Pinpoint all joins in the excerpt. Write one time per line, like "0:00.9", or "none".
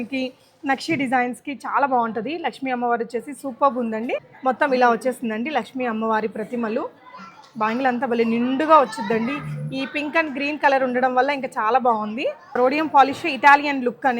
0:04.3
0:12.6